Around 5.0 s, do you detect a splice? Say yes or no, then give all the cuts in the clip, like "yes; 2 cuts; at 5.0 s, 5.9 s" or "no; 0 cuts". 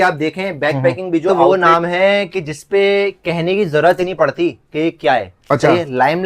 no; 1 cut; at 1.3 s